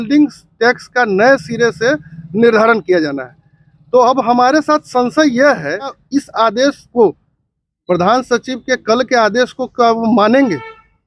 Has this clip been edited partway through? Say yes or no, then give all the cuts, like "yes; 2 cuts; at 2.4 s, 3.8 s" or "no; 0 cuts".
yes; 1 cut; at 6.0 s